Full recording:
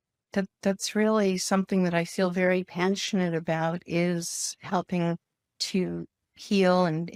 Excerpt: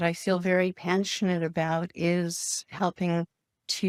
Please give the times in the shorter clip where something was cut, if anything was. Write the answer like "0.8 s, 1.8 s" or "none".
none